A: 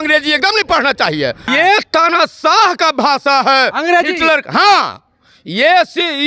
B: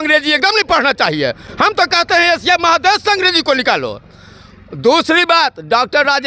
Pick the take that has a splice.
A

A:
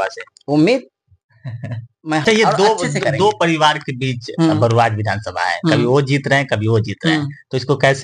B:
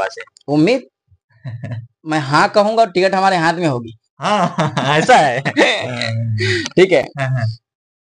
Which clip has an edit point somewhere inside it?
A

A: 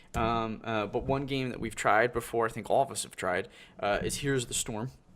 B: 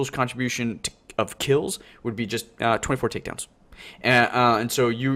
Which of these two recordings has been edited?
A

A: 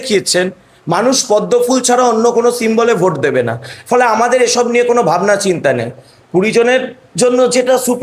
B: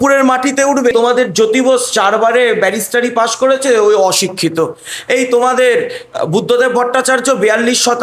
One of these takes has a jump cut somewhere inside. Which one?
B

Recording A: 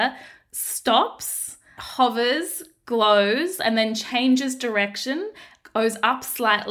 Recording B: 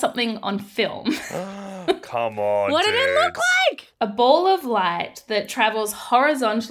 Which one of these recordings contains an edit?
B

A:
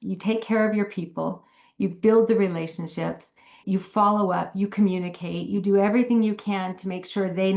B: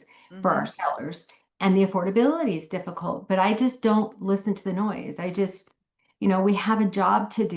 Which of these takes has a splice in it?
B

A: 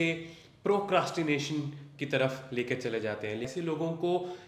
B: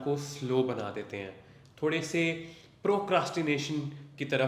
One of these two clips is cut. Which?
A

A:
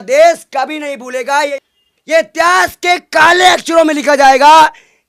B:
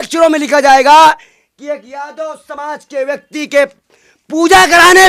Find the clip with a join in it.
A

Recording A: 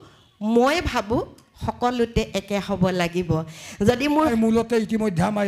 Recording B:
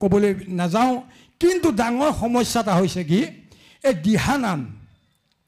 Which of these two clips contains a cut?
A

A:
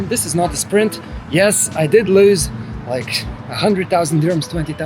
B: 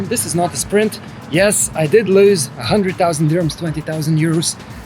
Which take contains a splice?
B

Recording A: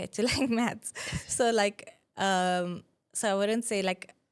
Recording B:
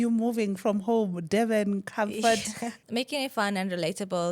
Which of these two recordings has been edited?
B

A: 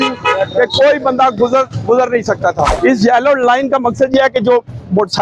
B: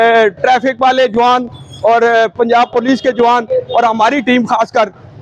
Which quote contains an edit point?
A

